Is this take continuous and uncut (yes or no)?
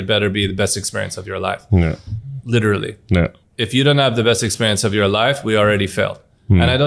yes